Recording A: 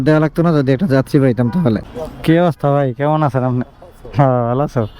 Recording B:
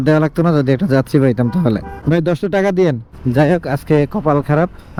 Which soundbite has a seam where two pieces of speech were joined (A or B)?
A